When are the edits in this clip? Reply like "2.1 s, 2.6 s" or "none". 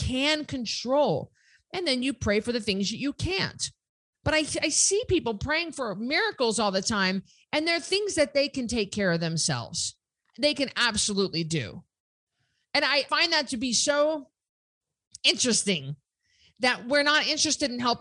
10.2 s, 13.1 s